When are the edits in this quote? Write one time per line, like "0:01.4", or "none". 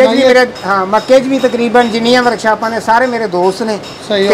none